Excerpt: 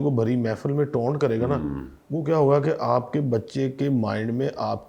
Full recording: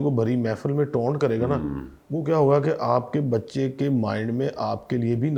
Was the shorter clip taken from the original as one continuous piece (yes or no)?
yes